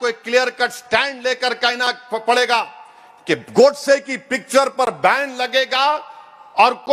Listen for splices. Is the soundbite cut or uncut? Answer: uncut